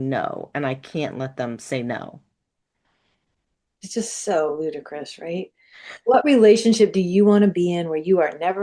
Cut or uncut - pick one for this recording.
uncut